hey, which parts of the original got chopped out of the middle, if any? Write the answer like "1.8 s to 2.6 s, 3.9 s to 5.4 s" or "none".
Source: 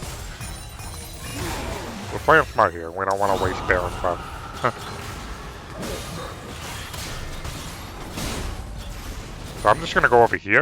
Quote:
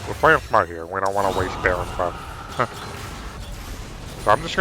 5.4 s to 8.8 s